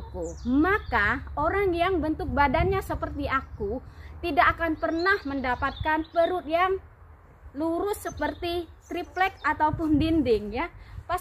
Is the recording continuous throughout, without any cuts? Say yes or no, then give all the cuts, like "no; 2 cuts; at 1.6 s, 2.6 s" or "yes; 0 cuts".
no; 1 cut; at 8.0 s